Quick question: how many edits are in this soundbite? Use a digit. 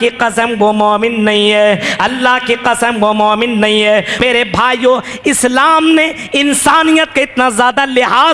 1